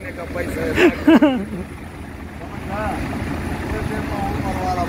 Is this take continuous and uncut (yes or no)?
yes